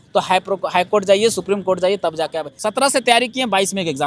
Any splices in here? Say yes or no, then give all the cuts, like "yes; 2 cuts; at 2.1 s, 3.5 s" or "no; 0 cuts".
yes; 1 cut; at 2.5 s